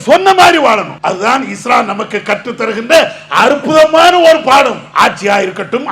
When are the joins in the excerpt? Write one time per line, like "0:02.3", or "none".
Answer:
0:00.9
0:04.8